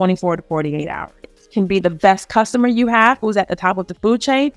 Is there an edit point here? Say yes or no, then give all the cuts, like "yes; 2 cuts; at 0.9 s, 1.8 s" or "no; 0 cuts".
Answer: yes; 2 cuts; at 1.2 s, 3.2 s